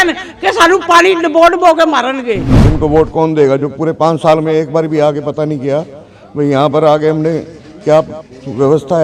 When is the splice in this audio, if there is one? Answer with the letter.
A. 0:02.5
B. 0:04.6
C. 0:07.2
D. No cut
A